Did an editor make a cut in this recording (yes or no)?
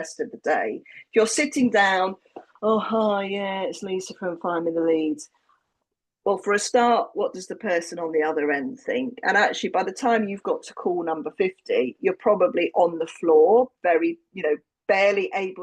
no